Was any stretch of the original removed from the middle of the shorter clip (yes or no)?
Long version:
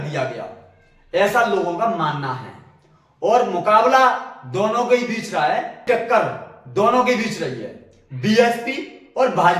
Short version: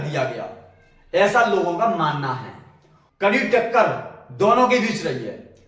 yes